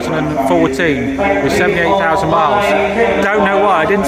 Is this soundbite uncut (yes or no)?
yes